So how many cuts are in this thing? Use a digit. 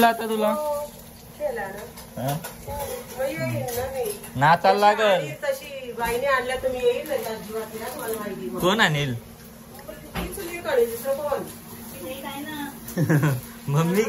0